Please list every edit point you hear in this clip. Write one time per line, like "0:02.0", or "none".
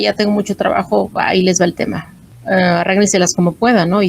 0:02.3